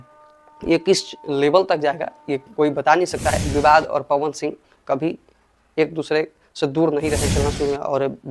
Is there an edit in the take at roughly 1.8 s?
no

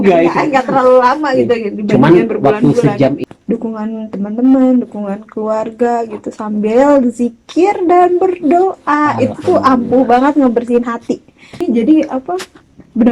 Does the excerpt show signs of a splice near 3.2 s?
yes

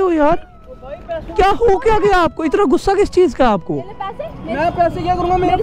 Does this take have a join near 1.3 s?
yes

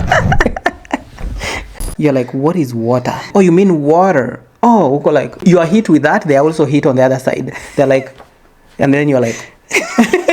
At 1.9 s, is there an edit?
yes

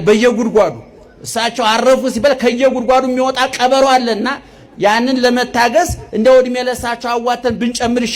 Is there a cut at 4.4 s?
no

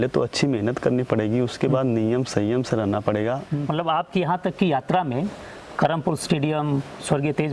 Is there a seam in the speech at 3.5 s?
yes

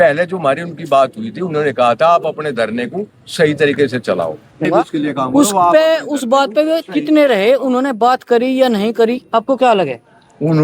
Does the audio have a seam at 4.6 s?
yes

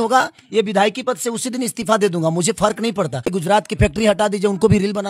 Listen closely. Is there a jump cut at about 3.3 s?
yes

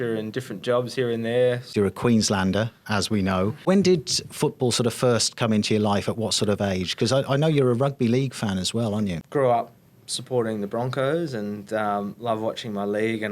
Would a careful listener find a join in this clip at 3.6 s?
yes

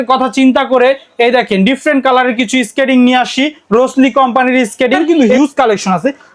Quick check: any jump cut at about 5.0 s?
yes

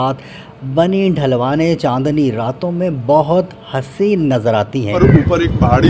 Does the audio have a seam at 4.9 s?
yes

